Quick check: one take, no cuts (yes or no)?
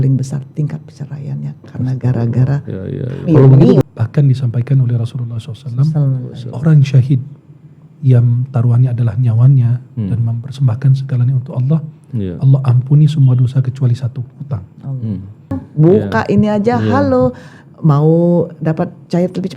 no